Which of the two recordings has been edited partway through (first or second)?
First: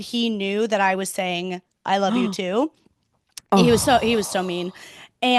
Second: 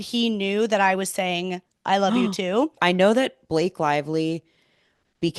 second